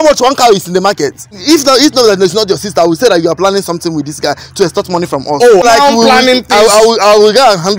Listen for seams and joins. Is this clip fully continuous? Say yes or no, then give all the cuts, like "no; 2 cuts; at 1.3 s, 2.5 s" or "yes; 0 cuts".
no; 2 cuts; at 1.4 s, 5.6 s